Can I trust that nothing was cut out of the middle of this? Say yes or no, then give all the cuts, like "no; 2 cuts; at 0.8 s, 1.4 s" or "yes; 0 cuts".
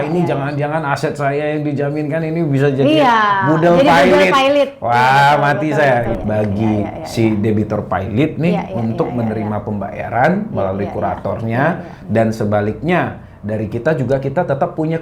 no; 1 cut; at 6.2 s